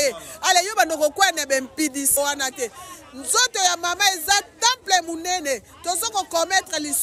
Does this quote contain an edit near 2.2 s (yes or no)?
yes